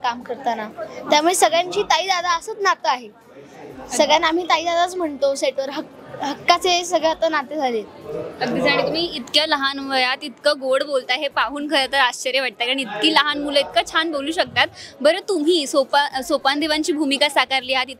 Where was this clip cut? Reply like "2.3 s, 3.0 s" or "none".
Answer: none